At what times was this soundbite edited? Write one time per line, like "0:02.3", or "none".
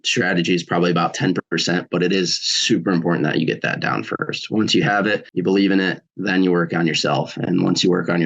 none